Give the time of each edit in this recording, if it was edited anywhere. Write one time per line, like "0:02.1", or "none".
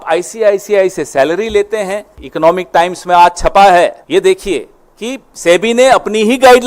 0:02.2
0:04.0